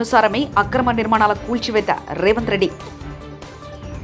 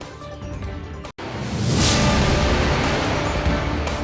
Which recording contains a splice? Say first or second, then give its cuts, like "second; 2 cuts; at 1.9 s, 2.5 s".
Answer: second; 1 cut; at 1.1 s